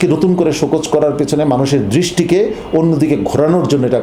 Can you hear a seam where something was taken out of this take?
no; 0 cuts

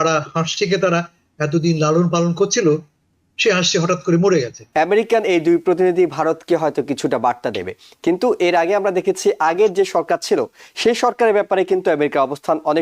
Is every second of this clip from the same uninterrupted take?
no; 1 cut; at 4.6 s

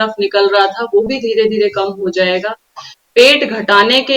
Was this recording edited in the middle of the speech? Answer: no; 0 cuts

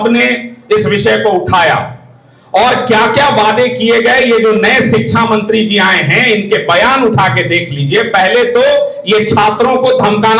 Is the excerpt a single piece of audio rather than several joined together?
yes; 0 cuts

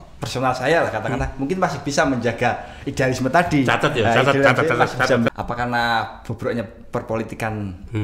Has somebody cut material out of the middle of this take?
yes; 1 cut; at 5.3 s

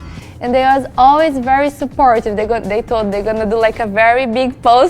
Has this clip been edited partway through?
no; 0 cuts

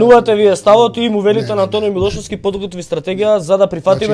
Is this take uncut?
yes; 0 cuts

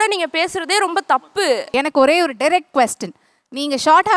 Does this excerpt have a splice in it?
yes; 1 cut; at 1.4 s

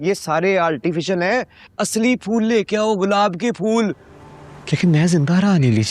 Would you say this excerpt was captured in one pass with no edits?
no; 1 cut; at 4.1 s

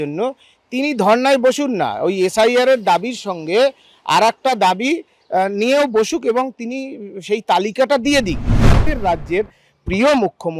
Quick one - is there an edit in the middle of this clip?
yes; 1 cut; at 8.9 s

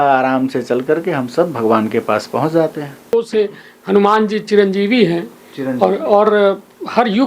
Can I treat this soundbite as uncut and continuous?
no; 1 cut; at 3.1 s

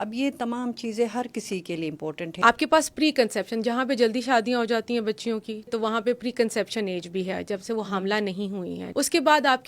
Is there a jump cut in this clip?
yes; 3 cuts; at 2.2 s, 5.7 s, 8.8 s

